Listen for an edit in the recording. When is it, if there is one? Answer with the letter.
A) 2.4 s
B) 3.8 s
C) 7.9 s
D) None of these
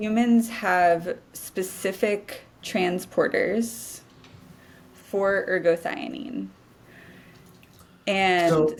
D